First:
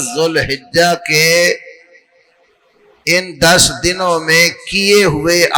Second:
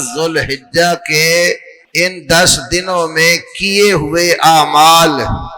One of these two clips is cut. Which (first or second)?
second